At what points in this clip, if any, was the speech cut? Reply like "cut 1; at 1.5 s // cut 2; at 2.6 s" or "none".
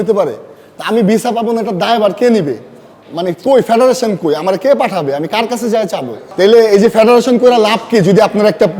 cut 1; at 6.2 s